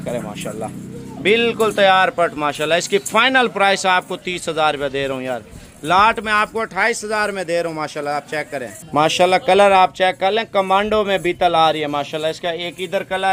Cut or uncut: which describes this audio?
uncut